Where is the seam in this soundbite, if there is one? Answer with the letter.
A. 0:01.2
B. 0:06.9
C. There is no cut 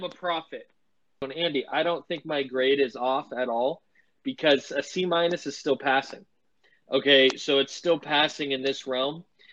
A